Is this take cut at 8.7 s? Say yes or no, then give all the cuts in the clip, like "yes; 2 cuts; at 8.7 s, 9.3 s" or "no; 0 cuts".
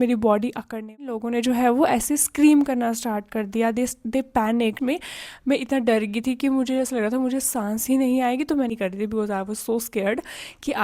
yes; 3 cuts; at 1.1 s, 4.8 s, 8.7 s